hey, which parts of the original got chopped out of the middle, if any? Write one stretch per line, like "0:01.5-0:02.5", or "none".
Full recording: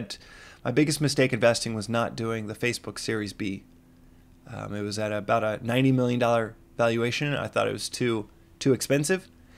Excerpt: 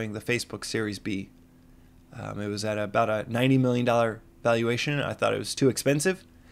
0:07.8-0:08.5